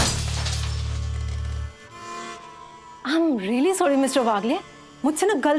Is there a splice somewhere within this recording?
no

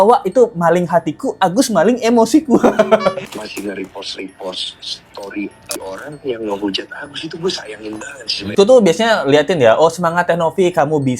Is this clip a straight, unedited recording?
no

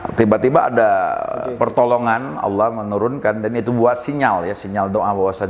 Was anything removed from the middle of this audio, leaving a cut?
no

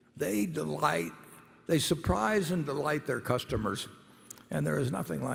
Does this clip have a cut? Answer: no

